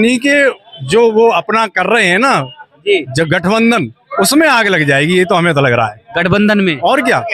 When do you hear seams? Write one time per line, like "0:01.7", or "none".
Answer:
none